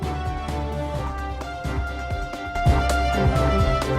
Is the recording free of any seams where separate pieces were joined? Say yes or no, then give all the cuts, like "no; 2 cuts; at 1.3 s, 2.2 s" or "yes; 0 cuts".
no; 1 cut; at 2.5 s